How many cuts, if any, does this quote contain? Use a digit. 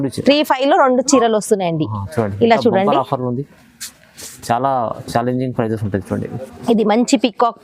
0